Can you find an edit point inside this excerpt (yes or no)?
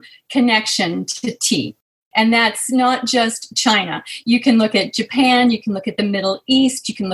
no